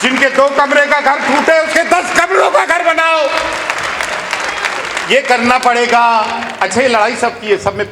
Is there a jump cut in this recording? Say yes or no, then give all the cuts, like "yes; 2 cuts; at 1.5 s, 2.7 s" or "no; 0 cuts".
no; 0 cuts